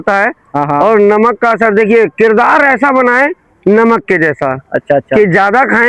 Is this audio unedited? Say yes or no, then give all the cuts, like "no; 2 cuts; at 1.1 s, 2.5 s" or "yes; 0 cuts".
yes; 0 cuts